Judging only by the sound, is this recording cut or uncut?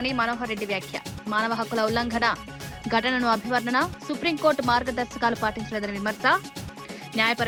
uncut